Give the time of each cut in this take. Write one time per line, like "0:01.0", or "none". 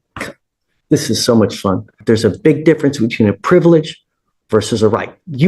0:02.0